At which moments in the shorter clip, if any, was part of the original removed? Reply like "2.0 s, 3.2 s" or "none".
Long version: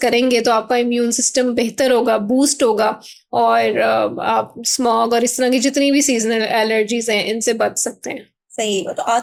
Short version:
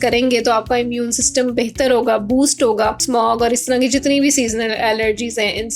3.0 s